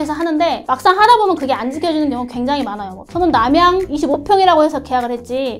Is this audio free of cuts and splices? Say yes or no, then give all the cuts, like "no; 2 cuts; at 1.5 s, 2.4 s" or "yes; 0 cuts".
no; 1 cut; at 3.0 s